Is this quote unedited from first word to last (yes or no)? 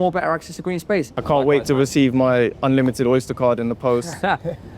no